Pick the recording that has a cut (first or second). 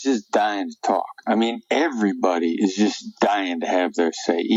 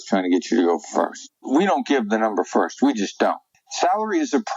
second